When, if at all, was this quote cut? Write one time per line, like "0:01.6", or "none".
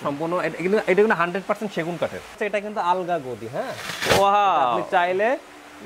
0:02.4